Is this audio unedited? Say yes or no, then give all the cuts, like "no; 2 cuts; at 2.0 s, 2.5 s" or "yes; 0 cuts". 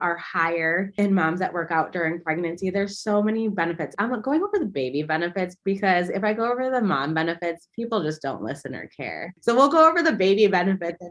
no; 3 cuts; at 1.0 s, 3.9 s, 9.2 s